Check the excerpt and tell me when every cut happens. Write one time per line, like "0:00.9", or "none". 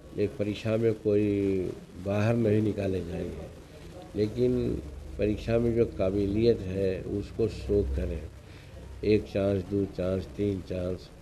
none